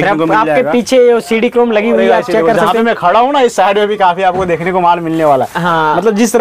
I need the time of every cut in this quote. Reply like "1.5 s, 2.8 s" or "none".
none